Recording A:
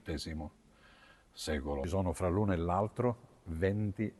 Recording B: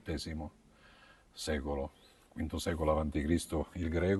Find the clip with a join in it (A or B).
A